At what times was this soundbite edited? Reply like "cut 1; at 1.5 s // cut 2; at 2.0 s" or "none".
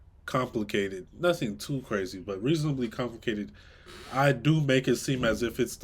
none